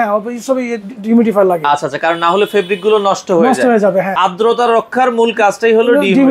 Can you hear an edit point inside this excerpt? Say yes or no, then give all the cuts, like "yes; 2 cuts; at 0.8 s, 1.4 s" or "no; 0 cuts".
yes; 1 cut; at 4.1 s